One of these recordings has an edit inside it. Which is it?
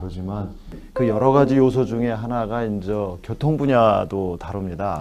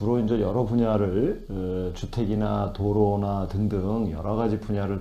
second; 1 cut; at 3.5 s

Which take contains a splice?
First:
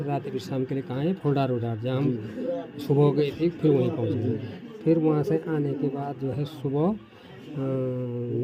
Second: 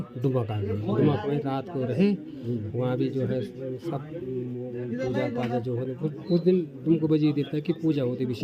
first; 1 cut; at 5.9 s

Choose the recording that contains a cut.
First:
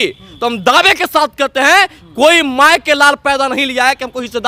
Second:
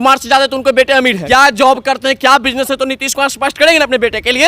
second; 1 cut; at 1.2 s

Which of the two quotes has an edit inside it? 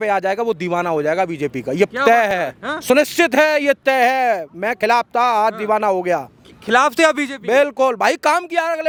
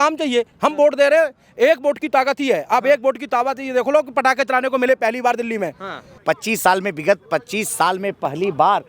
second; 1 cut; at 6.1 s

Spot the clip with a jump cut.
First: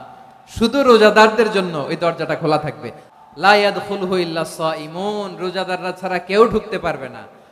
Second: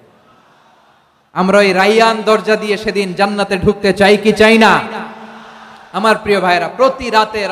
first; 1 cut; at 3.0 s

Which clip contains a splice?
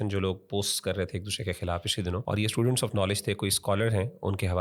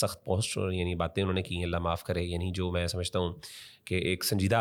first; 1 cut; at 2.2 s

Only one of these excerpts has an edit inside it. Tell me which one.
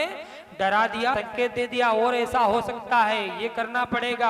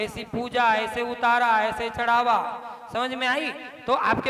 first; 1 cut; at 1.2 s

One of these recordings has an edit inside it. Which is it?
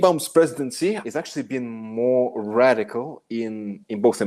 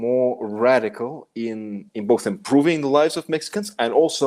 first; 1 cut; at 1.0 s

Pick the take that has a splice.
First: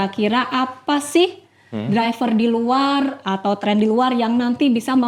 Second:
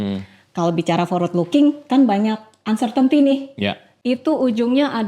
second; 1 cut; at 3.9 s

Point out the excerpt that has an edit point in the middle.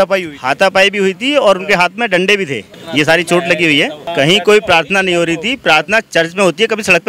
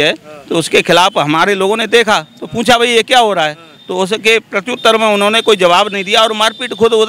first; 2 cuts; at 2.7 s, 4.0 s

